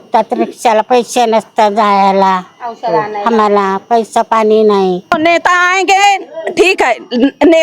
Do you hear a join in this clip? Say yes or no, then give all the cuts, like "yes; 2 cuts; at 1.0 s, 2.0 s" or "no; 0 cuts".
yes; 1 cut; at 5.1 s